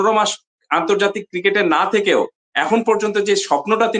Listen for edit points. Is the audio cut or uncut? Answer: uncut